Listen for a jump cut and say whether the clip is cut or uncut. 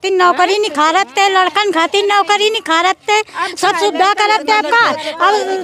uncut